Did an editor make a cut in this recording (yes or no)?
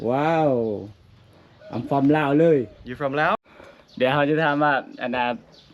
yes